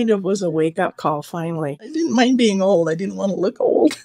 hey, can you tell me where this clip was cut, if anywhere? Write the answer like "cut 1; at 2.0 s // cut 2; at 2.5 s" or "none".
cut 1; at 1.8 s